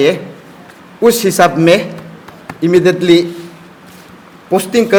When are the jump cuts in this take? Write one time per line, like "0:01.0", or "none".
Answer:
none